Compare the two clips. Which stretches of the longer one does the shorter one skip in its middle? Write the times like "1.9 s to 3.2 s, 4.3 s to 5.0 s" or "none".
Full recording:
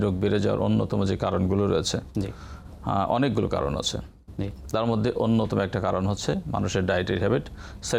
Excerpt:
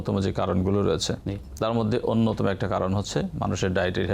2.0 s to 4.3 s